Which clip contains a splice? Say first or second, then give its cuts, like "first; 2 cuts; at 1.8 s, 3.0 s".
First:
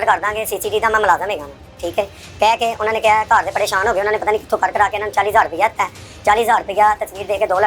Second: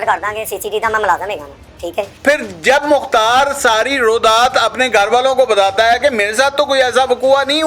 second; 1 cut; at 2.1 s